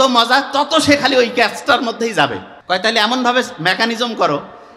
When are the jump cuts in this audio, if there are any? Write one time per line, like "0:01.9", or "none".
0:02.5